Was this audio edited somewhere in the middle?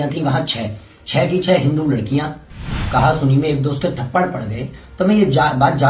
yes; 1 cut; at 2.8 s

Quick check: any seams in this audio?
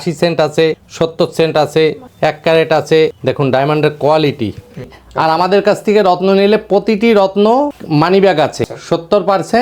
yes; 4 cuts; at 0.8 s, 2.1 s, 3.2 s, 5.0 s

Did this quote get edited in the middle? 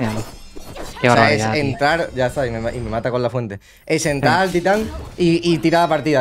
no; 0 cuts

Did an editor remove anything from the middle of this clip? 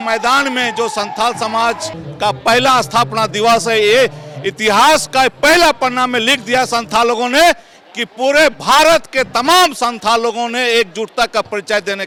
no; 0 cuts

